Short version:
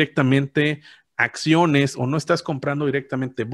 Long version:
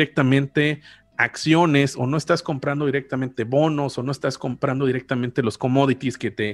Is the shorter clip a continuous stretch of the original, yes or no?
yes